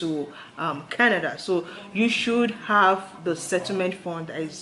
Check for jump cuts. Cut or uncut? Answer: uncut